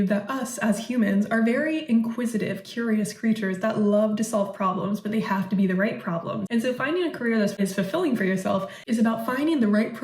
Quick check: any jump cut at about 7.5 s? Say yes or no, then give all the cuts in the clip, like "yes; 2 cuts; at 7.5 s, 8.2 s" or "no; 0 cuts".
yes; 2 cuts; at 6.4 s, 7.5 s